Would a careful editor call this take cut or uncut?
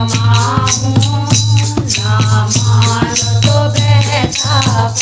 uncut